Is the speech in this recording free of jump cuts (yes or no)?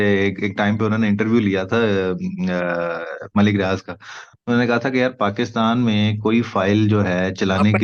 yes